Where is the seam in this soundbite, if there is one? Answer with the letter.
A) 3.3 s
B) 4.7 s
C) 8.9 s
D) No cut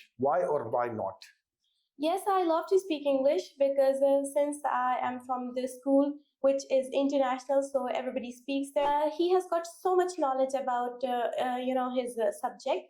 C